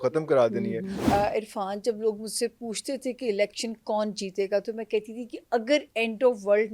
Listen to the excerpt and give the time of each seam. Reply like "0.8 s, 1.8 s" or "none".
1.0 s